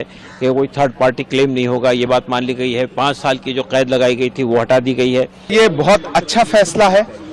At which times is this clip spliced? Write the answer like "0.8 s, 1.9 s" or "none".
5.4 s